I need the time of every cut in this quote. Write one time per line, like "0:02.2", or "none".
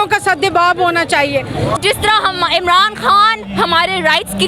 0:01.8